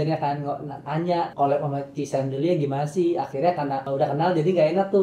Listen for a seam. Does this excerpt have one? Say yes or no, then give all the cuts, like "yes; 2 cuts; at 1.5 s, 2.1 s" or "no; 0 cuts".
yes; 2 cuts; at 1.3 s, 3.9 s